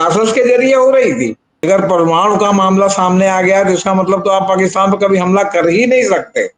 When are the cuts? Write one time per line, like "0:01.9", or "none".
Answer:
0:01.5